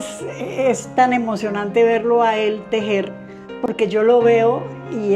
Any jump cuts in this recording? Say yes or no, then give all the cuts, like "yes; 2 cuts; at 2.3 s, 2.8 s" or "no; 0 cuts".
no; 0 cuts